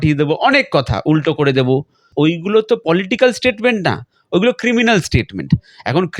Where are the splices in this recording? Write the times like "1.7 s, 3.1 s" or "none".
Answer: 2.0 s